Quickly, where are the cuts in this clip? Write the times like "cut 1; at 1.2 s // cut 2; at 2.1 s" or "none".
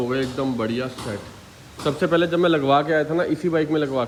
none